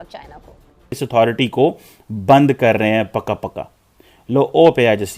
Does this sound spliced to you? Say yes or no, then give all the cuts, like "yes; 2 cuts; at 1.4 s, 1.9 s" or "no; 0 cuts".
yes; 1 cut; at 1.0 s